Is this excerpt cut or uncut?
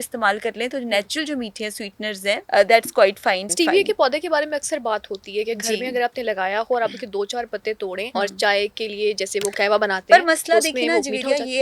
cut